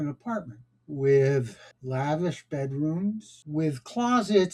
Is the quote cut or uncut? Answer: uncut